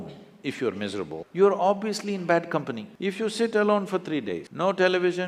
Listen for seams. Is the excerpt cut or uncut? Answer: cut